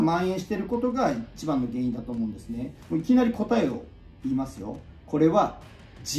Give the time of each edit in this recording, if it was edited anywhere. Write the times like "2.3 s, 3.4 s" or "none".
2.8 s, 4.8 s